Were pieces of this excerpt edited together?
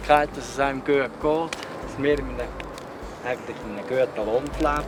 no; 0 cuts

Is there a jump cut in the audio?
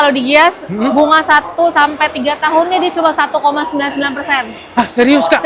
no; 0 cuts

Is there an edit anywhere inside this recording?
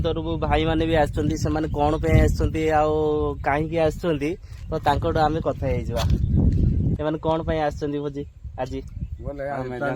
yes; 1 cut; at 7.0 s

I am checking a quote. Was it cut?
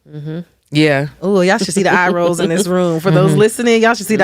no; 0 cuts

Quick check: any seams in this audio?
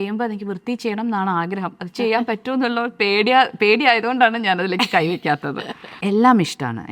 yes; 1 cut; at 5.9 s

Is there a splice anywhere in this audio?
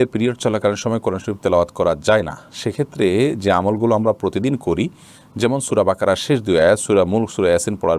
no; 0 cuts

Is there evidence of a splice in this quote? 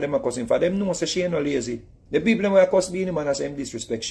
yes; 1 cut; at 1.9 s

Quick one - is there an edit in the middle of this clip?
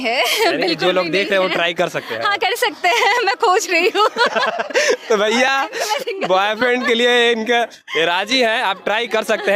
no; 0 cuts

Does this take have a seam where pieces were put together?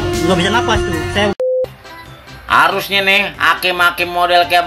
yes; 1 cut; at 1.4 s

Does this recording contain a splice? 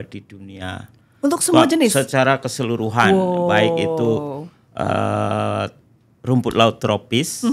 no; 0 cuts

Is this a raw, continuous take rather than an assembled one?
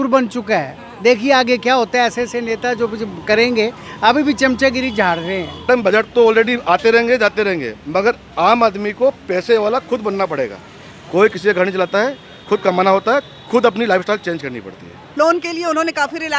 no; 2 cuts; at 5.6 s, 15.1 s

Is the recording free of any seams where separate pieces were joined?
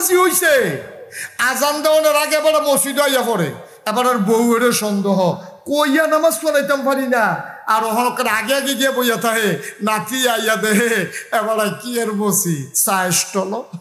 yes; 0 cuts

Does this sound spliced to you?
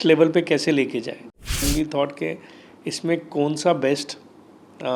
yes; 1 cut; at 1.6 s

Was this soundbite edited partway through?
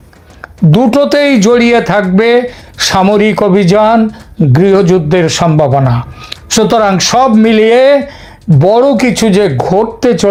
no; 0 cuts

